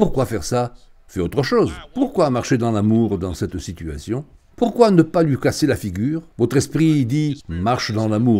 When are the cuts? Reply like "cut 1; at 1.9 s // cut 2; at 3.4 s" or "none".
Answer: cut 1; at 6.3 s